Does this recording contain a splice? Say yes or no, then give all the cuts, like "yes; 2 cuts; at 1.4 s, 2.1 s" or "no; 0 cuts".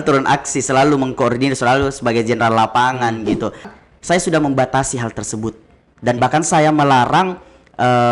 yes; 1 cut; at 3.7 s